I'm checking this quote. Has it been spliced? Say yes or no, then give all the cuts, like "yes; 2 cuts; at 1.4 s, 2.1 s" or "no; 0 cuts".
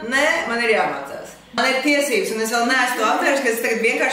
yes; 1 cut; at 1.6 s